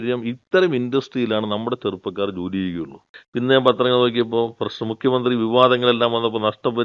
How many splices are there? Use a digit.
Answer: 1